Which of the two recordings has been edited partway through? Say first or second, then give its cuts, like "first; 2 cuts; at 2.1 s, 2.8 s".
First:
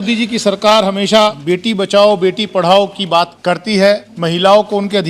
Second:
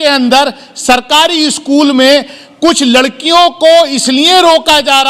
first; 3 cuts; at 1.4 s, 3.3 s, 4.1 s